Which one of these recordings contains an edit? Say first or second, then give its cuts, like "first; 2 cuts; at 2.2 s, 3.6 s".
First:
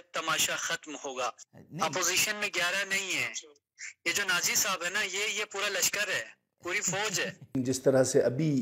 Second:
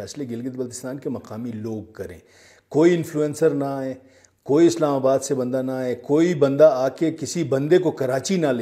first; 2 cuts; at 1.4 s, 7.5 s